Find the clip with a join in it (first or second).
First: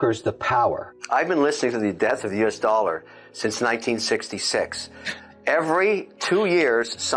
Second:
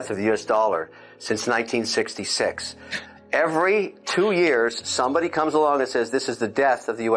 first